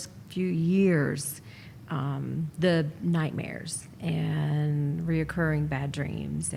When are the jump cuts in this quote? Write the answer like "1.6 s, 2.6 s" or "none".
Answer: none